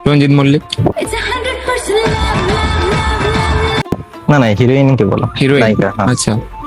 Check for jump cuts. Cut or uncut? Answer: cut